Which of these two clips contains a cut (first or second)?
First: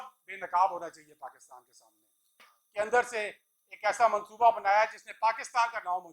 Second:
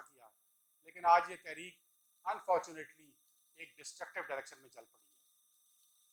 first